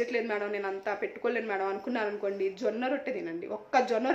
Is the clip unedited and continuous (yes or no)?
yes